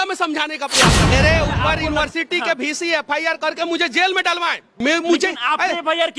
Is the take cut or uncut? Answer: cut